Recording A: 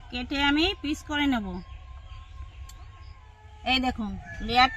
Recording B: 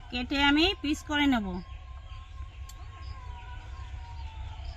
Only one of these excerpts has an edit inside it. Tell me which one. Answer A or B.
A